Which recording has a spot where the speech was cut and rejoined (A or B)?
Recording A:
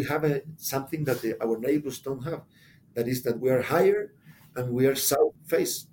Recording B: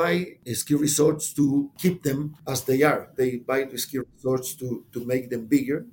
A